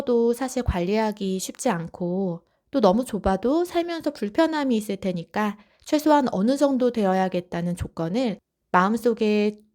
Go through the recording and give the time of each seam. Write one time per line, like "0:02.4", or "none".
0:08.5